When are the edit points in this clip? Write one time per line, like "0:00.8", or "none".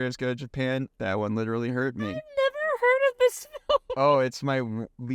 0:00.9